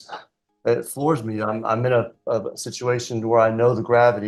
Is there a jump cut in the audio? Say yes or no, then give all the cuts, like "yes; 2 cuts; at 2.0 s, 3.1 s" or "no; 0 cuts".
no; 0 cuts